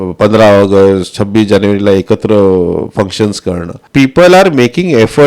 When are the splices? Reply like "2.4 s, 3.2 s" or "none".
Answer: 3.8 s